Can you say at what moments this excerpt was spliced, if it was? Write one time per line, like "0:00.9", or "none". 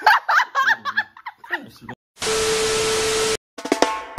0:02.1

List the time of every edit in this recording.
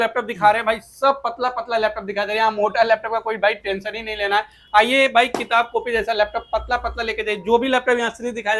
none

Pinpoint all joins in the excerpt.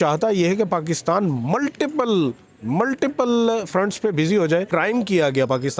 0:04.7

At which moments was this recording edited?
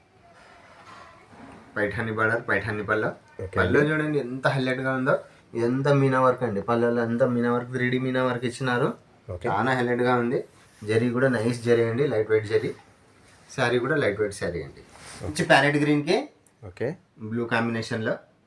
0:15.4

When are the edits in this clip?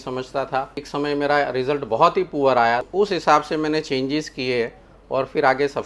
0:00.9
0:02.9

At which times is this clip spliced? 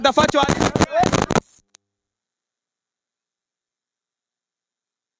none

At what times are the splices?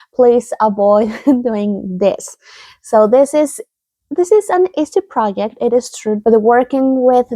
0:06.2

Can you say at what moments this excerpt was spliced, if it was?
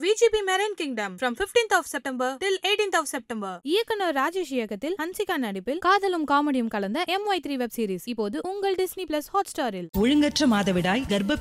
none

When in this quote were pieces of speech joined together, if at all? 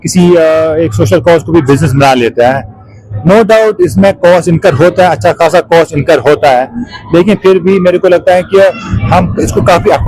none

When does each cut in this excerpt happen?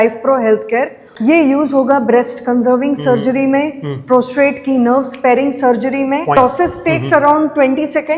0:01.0
0:06.4

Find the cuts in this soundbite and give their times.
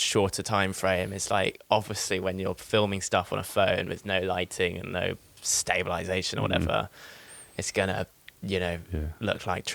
none

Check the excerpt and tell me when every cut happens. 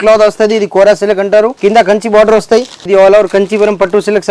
0:01.5
0:02.9

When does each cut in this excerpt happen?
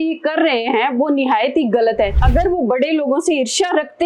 0:02.2

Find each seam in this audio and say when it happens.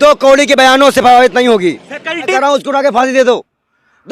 0:02.2

